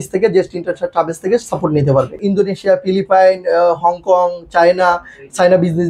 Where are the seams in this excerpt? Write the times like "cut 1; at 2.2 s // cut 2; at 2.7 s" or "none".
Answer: cut 1; at 2.2 s